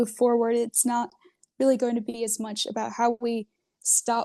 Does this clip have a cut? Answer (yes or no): no